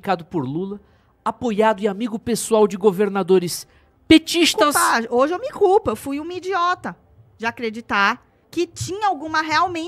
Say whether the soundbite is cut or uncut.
cut